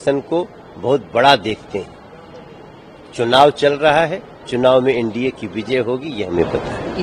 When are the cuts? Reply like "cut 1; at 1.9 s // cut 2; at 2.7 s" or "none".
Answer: none